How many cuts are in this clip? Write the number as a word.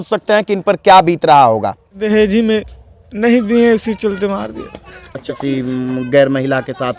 two